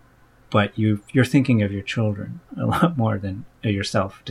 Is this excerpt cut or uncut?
uncut